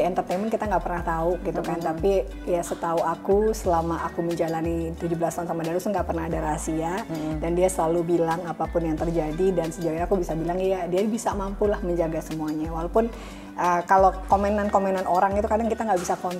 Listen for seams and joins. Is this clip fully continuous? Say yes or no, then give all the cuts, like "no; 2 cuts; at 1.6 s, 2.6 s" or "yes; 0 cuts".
yes; 0 cuts